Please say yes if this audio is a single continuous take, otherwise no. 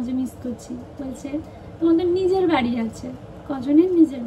yes